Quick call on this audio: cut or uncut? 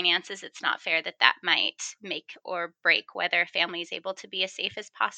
uncut